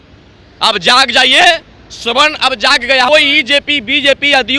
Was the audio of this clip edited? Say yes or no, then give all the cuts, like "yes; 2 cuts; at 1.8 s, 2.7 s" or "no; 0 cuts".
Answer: yes; 1 cut; at 3.1 s